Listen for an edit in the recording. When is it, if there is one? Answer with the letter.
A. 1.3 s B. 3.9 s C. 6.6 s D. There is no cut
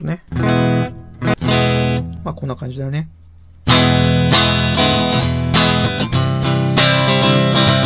A